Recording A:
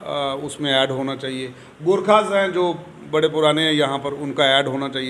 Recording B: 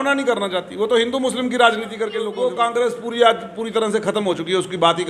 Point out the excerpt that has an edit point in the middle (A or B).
B